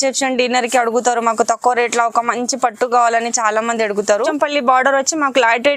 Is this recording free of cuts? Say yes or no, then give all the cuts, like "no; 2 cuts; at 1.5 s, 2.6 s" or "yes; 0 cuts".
no; 1 cut; at 4.3 s